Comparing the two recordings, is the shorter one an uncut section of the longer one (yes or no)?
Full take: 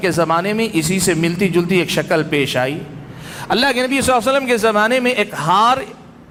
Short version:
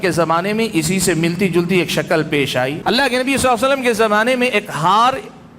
no